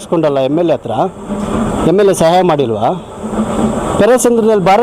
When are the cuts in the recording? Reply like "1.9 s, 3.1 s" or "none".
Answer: none